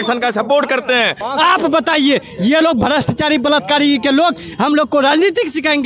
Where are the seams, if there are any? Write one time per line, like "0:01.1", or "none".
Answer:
0:01.3